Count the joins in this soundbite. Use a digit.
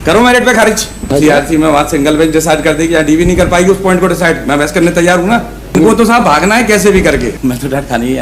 3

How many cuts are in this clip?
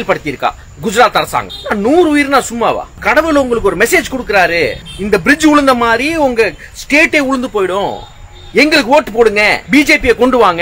4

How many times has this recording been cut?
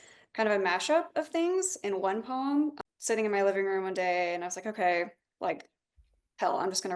1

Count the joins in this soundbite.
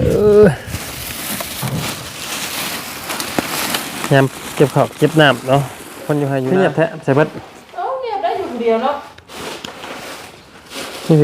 1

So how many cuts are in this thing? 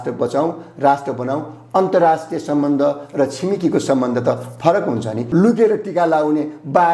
1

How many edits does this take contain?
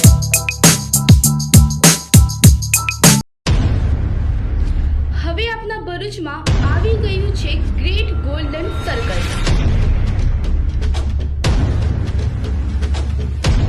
1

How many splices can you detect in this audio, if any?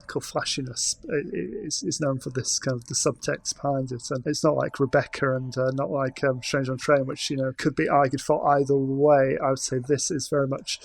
2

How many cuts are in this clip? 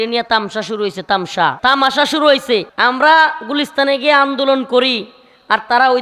2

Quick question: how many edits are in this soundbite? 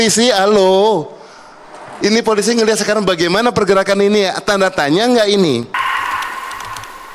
1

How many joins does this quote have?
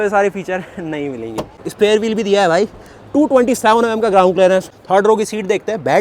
2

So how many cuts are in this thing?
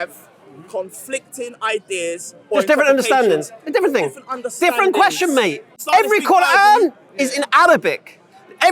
1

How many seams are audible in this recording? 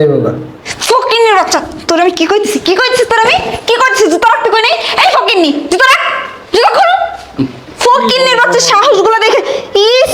0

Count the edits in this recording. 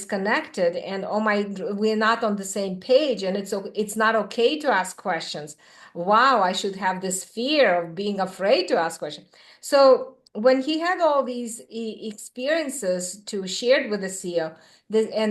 0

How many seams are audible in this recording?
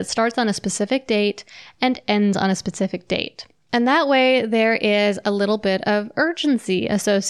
0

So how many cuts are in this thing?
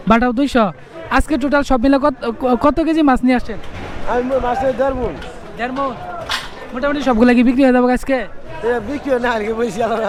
0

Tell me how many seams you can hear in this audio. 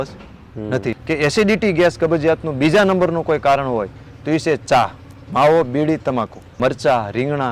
2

